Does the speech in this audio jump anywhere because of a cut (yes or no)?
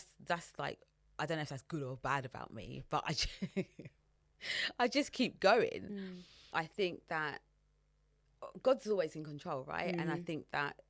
yes